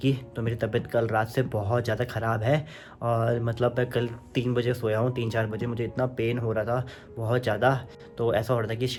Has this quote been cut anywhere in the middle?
no; 0 cuts

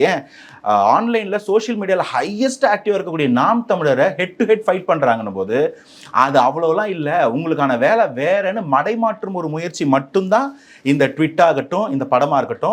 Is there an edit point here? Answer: no; 0 cuts

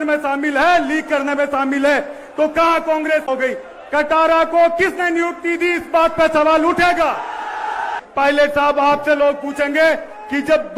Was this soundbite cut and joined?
yes; 2 cuts; at 3.2 s, 8.0 s

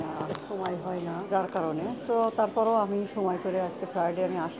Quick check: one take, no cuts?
no; 1 cut; at 1.3 s

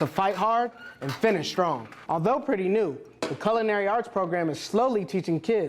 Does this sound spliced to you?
yes; 1 cut; at 1.9 s

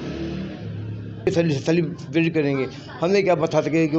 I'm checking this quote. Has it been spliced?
yes; 1 cut; at 1.3 s

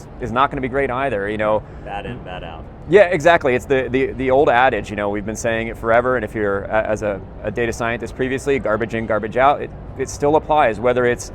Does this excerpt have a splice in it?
no; 0 cuts

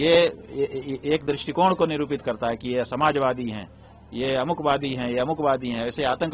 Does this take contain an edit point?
no; 0 cuts

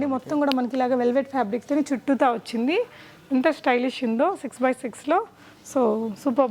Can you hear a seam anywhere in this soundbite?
no; 0 cuts

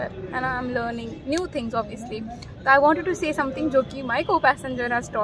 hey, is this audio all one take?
yes; 0 cuts

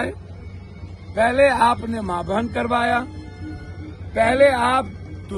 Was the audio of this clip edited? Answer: no; 0 cuts

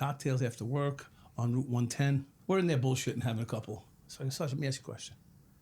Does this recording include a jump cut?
yes; 2 cuts; at 2.3 s, 3.9 s

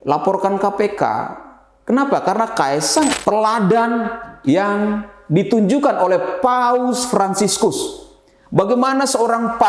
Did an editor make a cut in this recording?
yes; 1 cut; at 3.1 s

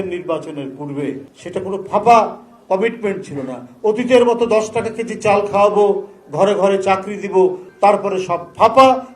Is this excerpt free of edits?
no; 2 cuts; at 1.3 s, 7.7 s

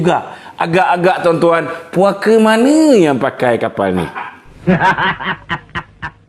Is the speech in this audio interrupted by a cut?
yes; 1 cut; at 4.5 s

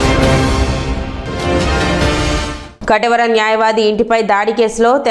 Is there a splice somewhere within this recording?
yes; 1 cut; at 2.6 s

